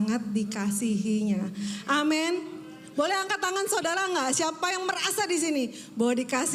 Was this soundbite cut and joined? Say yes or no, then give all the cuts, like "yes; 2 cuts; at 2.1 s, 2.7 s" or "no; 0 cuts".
no; 0 cuts